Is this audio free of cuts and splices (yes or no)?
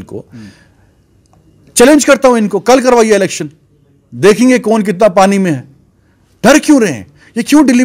yes